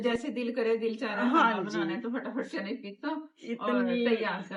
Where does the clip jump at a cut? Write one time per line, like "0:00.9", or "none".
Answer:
none